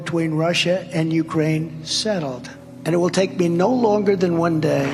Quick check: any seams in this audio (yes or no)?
no